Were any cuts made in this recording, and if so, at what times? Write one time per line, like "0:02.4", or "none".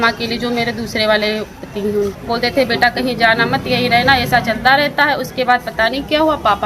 0:02.1